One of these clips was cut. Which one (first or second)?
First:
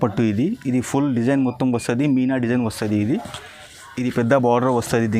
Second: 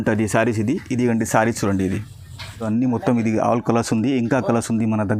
second